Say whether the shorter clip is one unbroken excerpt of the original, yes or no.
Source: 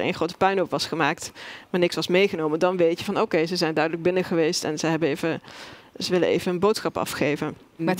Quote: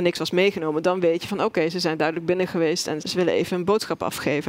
no